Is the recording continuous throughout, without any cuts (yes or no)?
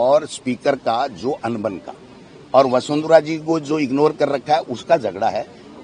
yes